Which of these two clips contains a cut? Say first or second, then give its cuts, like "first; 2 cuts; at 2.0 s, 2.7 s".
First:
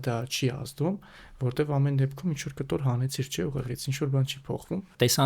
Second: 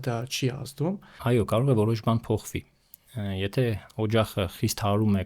second; 1 cut; at 1.1 s